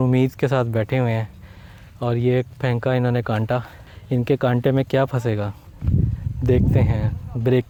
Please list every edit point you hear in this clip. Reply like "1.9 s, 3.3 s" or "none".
none